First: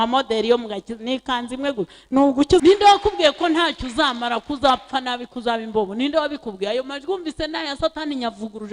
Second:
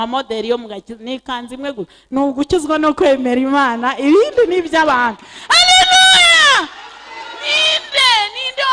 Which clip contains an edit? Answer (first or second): first